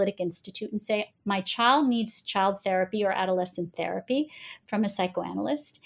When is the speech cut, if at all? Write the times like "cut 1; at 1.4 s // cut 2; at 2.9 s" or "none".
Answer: none